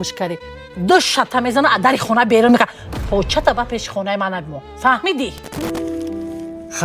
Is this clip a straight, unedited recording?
no; 1 cut; at 5.6 s

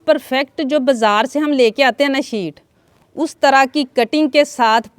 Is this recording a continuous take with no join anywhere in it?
yes; 0 cuts

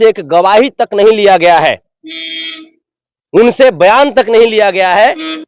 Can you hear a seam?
no; 0 cuts

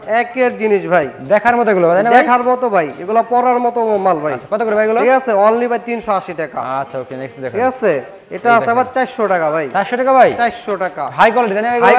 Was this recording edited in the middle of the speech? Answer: no; 0 cuts

